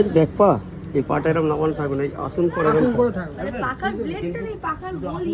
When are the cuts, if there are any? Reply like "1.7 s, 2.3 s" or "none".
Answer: none

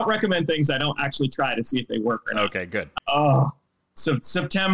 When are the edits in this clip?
2.9 s

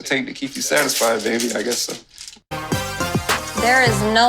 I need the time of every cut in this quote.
2.5 s

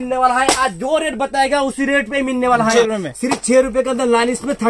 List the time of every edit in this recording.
2.7 s

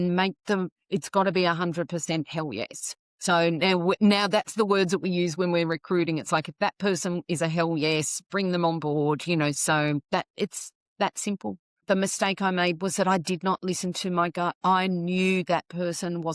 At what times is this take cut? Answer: 11.8 s

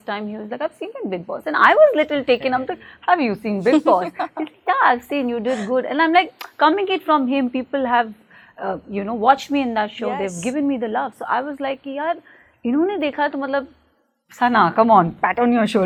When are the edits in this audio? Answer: none

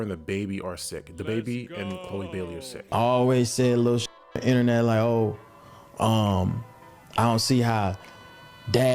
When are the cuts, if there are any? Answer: 2.8 s

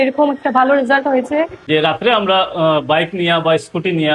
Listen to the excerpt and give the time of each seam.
1.6 s

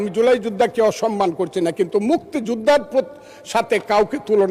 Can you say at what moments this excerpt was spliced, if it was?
none

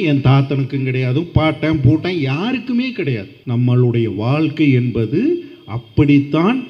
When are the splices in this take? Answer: 3.3 s

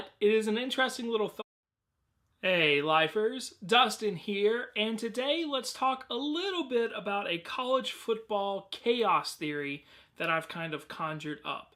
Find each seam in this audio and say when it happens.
none

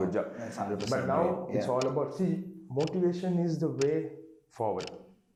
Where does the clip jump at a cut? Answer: none

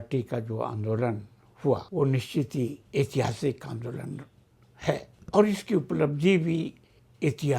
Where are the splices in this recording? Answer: 1.9 s, 2.8 s, 5.1 s

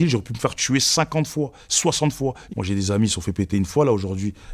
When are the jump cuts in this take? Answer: none

